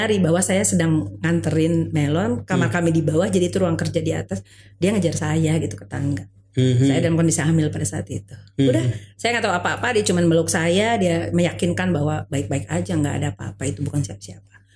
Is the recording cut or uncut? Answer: uncut